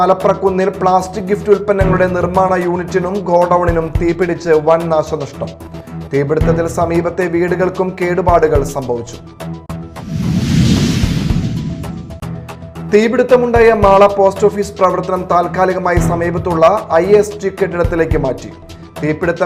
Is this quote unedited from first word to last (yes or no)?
yes